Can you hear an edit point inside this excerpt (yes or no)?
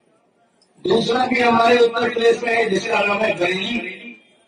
no